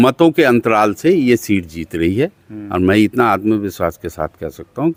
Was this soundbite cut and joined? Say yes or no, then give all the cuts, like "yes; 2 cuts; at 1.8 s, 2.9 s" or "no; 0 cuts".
no; 0 cuts